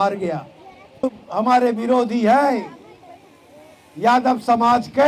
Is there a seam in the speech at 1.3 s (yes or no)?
yes